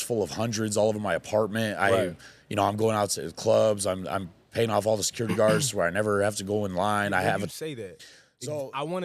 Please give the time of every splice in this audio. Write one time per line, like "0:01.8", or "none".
0:07.5